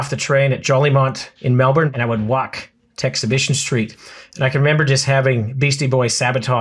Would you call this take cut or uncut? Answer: cut